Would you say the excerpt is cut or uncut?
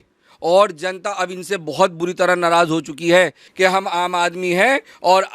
cut